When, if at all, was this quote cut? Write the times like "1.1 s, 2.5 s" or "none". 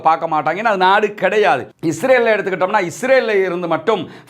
1.7 s